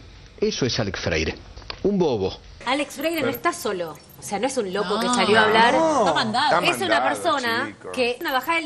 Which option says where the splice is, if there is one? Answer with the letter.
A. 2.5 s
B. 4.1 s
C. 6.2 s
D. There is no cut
A